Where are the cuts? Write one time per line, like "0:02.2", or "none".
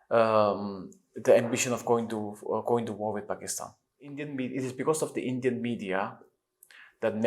0:04.2

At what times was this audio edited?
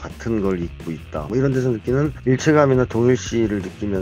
0:01.3
0:02.2

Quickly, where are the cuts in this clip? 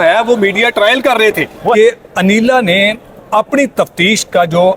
0:01.7

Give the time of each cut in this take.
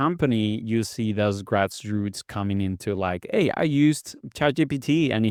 none

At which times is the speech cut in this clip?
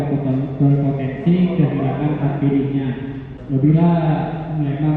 0:03.4

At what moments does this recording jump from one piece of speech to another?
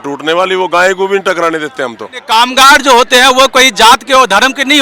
0:02.2

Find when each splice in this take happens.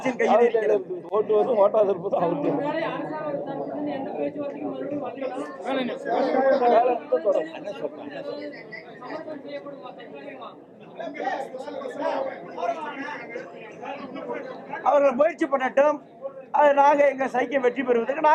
none

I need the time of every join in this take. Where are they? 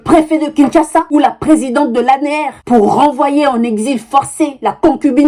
none

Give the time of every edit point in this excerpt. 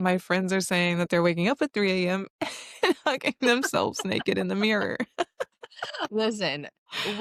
none

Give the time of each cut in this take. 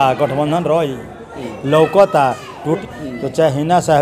0:02.8

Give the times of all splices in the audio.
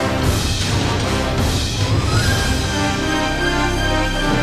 0:01.6

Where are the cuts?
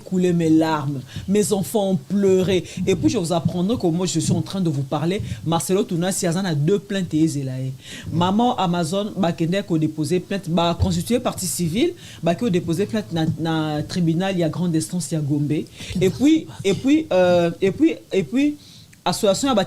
none

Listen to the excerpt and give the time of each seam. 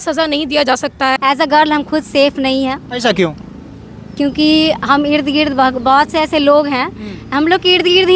0:01.1

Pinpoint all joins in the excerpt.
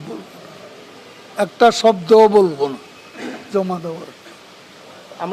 none

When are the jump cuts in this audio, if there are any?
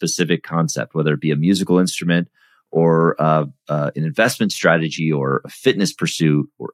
none

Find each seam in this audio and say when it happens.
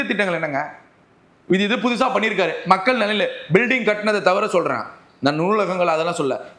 none

